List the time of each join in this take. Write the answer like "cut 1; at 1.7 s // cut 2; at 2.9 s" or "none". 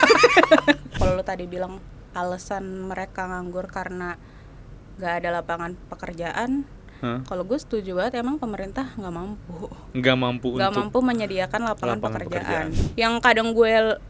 cut 1; at 1.0 s // cut 2; at 12.8 s

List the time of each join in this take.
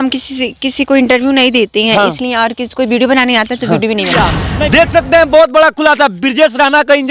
cut 1; at 4.1 s

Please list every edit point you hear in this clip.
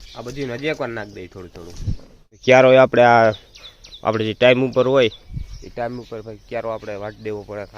cut 1; at 1.7 s

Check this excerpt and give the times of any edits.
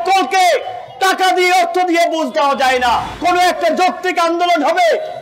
cut 1; at 3.1 s

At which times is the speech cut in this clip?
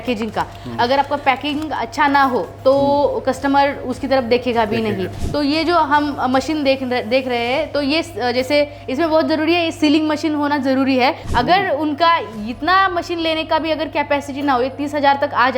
cut 1; at 5.2 s // cut 2; at 11.2 s

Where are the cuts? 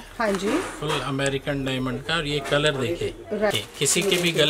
cut 1; at 3.5 s

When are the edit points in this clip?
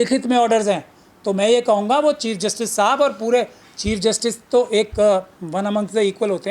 none

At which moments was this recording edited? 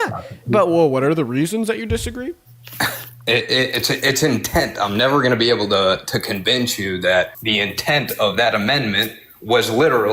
cut 1; at 7.4 s

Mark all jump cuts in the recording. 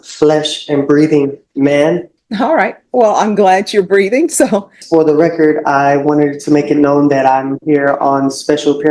cut 1; at 2.2 s // cut 2; at 4.8 s

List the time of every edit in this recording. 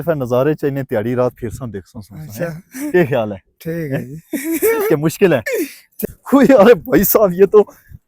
cut 1; at 6.0 s

